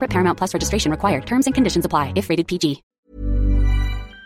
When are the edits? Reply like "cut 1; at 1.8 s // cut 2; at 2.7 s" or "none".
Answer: cut 1; at 2.9 s